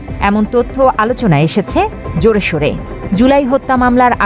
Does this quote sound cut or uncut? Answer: cut